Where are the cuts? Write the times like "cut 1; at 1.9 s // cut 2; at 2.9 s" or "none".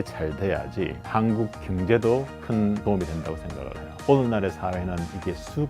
cut 1; at 3.9 s